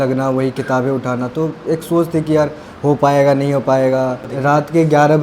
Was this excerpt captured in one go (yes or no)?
no